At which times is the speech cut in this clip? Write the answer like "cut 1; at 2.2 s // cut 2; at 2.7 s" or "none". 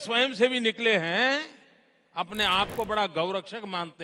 none